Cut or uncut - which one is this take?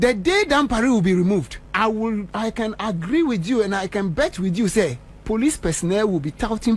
cut